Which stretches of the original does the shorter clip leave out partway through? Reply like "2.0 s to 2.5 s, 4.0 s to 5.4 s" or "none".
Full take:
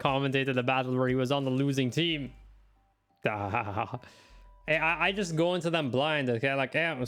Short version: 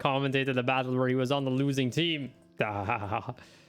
2.4 s to 3.0 s

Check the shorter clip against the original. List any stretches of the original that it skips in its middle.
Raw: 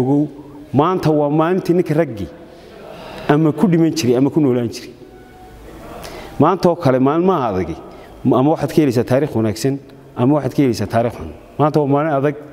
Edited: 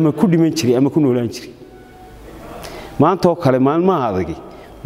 none

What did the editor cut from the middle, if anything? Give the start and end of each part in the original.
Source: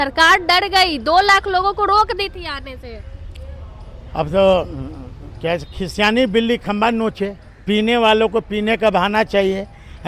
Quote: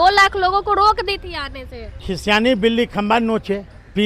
3.2 s to 5.8 s

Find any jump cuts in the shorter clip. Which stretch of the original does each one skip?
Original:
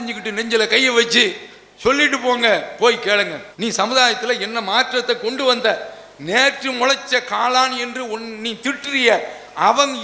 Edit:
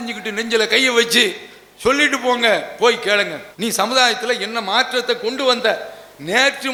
none

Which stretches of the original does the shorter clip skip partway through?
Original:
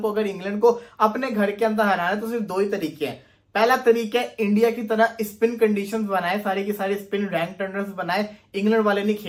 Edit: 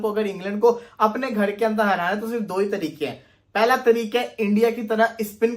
none

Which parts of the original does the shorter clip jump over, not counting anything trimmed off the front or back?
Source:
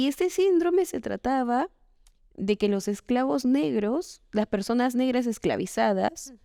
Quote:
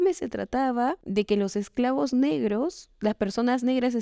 1.7 s to 2.3 s

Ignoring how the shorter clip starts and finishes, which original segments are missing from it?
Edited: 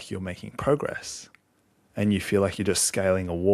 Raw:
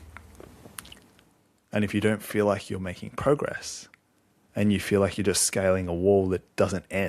none

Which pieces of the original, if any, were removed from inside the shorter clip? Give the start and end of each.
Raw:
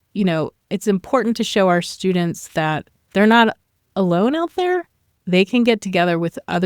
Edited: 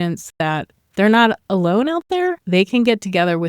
3.6 s to 3.9 s, 4.9 s to 5.2 s

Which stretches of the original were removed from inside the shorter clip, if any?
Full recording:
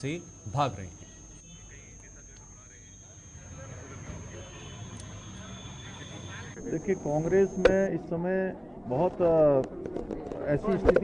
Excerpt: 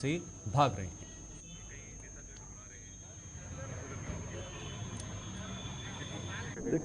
none

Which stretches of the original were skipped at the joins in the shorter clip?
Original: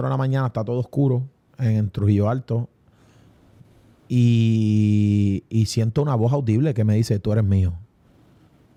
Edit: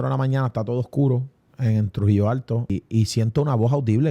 2.7 s to 5.3 s

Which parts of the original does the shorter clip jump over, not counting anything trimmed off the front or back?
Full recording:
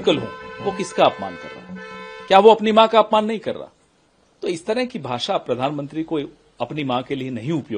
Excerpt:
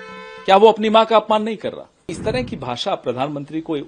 4.0 s to 4.6 s

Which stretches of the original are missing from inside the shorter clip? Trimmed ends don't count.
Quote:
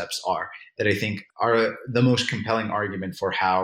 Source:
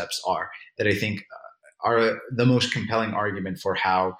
1.2 s to 1.7 s

